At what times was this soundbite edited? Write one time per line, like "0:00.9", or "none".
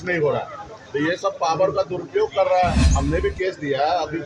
0:02.9